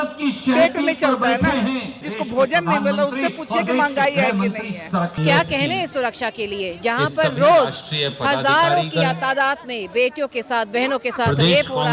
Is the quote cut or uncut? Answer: cut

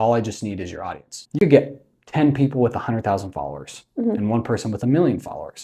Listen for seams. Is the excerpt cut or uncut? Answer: cut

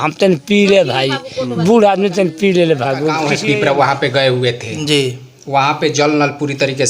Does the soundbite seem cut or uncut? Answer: cut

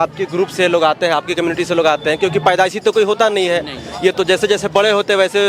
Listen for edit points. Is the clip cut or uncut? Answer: uncut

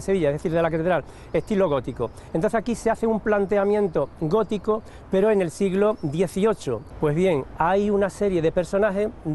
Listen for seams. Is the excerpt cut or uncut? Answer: cut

